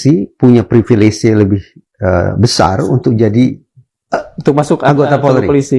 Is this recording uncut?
yes; 0 cuts

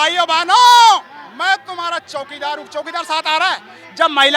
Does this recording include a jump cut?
no; 0 cuts

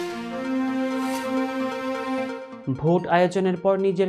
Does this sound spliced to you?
yes; 1 cut; at 2.5 s

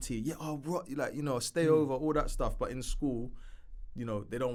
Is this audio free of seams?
yes; 0 cuts

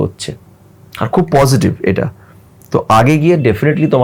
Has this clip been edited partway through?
no; 0 cuts

